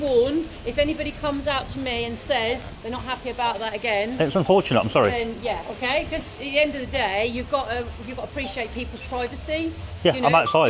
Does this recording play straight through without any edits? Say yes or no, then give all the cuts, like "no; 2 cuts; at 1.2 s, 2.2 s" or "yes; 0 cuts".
yes; 0 cuts